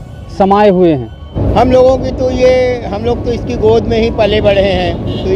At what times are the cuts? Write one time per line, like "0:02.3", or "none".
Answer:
0:01.4

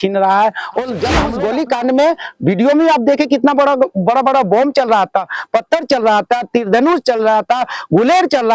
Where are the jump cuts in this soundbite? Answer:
0:01.2

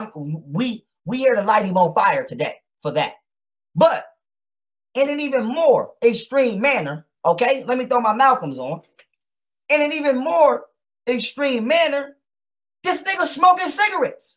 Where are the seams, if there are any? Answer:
0:02.3

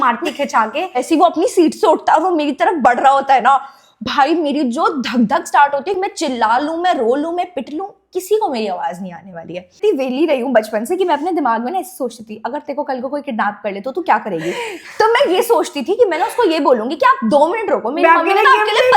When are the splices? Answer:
0:01.0
0:06.0
0:09.7

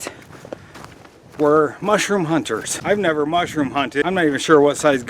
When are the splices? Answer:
0:02.7
0:04.0

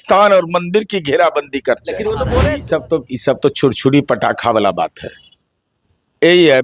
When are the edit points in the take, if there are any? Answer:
0:02.4

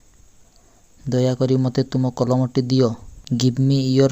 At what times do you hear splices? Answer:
0:03.1

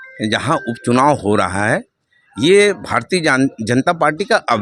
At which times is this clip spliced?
none

